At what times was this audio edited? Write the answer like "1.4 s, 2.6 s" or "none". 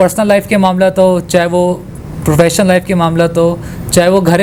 none

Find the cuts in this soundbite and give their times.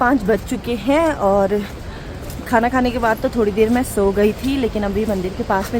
none

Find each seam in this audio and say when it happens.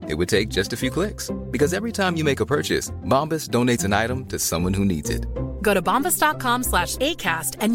none

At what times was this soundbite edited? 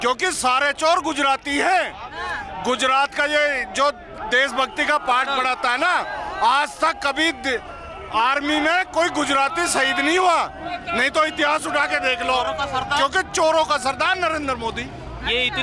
none

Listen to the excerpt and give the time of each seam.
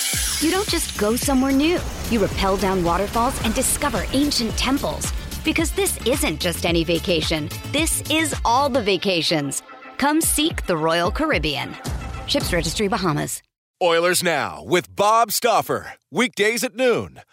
13.6 s

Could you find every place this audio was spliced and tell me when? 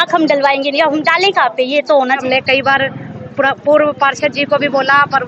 2.2 s

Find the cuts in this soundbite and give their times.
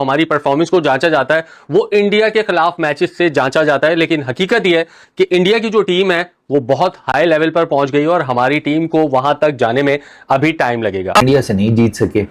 11.2 s

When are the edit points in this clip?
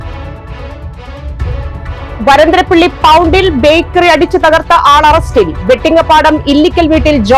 1.6 s

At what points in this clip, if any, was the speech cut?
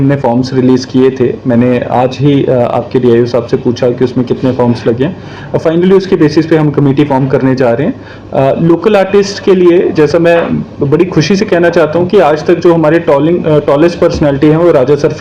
none

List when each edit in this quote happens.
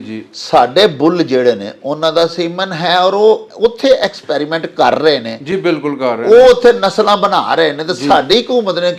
none

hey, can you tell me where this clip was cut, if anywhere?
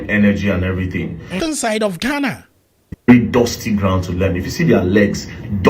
1.4 s

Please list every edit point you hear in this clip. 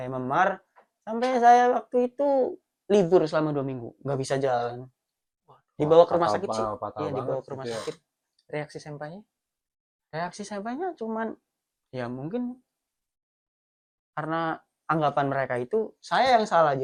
none

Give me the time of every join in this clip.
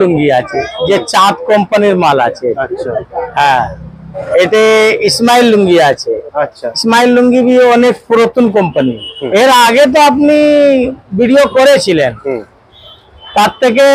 4.2 s, 9.1 s

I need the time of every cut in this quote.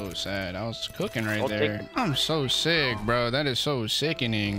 none

